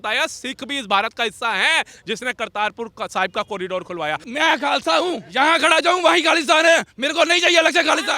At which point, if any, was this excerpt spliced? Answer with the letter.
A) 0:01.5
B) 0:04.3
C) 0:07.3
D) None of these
B